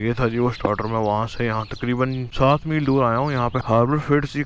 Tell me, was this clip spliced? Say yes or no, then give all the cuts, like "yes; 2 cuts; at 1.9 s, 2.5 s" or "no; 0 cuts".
yes; 1 cut; at 2.3 s